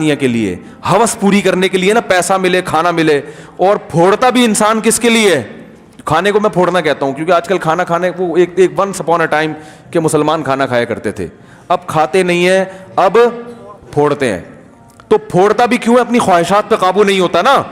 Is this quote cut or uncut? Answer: uncut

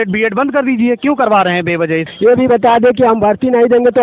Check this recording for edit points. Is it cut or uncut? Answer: cut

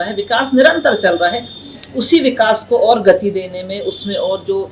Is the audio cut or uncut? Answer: uncut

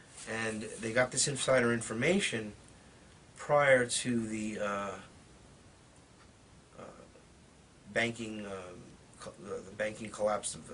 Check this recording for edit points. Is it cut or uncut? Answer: uncut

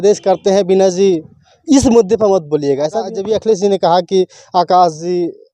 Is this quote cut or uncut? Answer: cut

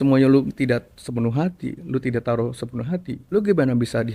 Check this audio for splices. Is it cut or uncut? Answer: cut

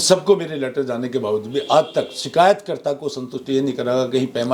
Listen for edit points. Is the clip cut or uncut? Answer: uncut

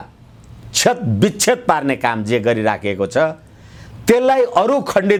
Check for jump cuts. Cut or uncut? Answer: uncut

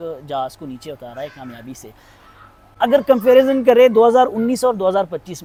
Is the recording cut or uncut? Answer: uncut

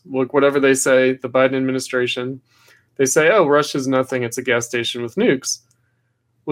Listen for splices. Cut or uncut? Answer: uncut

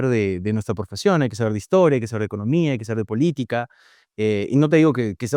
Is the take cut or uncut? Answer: uncut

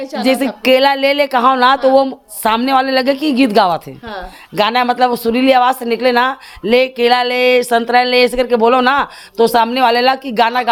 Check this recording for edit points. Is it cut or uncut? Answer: uncut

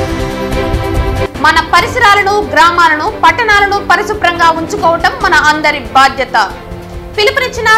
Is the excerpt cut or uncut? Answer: cut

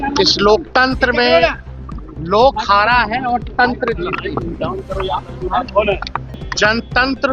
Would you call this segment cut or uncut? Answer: cut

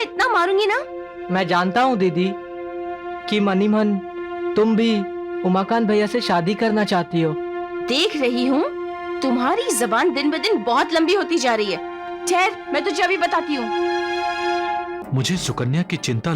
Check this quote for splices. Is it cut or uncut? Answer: cut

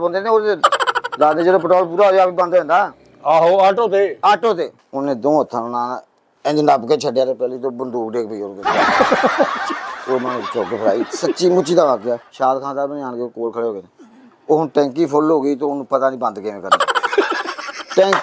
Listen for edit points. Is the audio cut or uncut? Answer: cut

